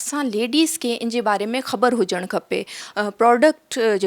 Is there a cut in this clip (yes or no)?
yes